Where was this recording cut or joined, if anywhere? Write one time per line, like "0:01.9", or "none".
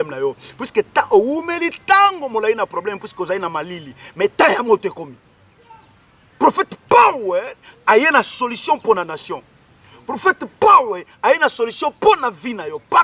none